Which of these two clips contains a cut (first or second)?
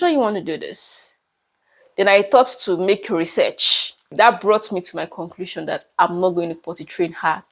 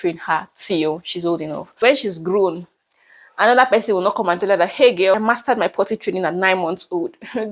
second